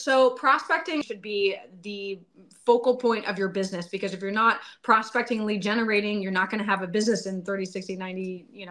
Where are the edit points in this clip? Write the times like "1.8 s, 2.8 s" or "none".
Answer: 1.0 s